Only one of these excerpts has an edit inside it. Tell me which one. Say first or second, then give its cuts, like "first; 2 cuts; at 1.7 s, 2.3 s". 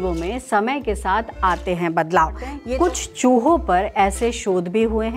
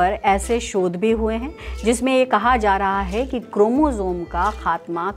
first; 1 cut; at 2.6 s